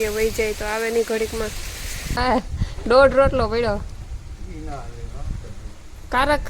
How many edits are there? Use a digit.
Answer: 1